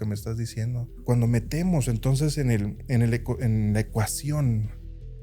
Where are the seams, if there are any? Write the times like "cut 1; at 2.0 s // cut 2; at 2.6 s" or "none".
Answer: cut 1; at 1.0 s